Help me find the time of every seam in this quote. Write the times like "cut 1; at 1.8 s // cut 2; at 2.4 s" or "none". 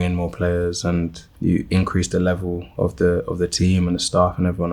cut 1; at 1.2 s